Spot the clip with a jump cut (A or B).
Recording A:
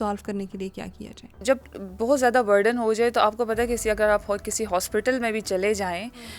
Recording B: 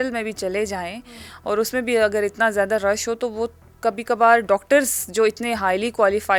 A